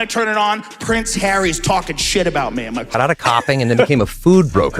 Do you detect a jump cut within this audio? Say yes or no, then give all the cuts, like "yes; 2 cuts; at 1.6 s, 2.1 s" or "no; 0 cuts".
yes; 1 cut; at 2.9 s